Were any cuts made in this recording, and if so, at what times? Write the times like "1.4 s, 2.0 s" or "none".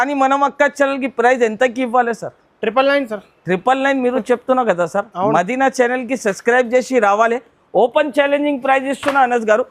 none